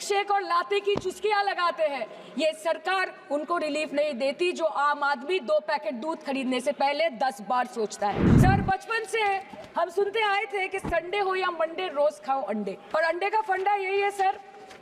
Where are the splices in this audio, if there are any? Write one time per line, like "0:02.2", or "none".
0:08.3
0:12.8